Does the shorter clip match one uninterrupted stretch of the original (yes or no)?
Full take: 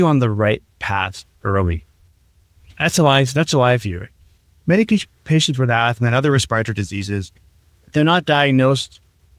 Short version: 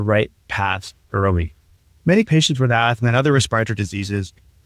no